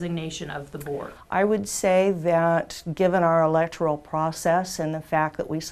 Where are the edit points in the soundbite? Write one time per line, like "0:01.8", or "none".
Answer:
0:01.2